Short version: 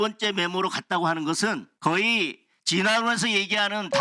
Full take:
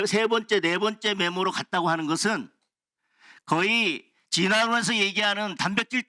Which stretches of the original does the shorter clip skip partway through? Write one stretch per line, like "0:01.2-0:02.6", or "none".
0:02.5-0:03.3